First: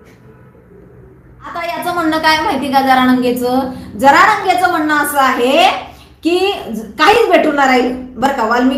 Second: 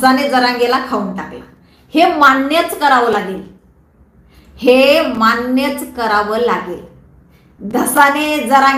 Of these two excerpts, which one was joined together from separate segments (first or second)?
first